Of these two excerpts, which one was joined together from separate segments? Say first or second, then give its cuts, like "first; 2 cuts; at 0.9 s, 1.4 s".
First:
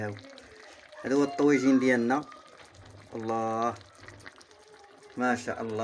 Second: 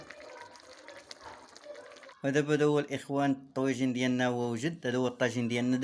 second; 1 cut; at 2.1 s